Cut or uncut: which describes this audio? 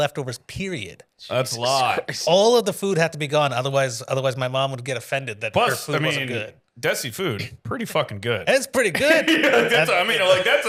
uncut